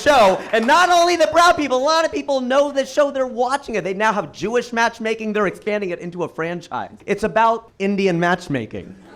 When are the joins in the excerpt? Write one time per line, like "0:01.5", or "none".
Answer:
0:07.0
0:07.7